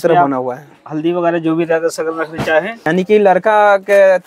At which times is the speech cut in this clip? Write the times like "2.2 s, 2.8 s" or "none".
2.8 s